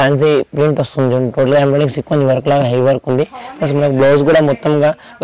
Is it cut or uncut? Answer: uncut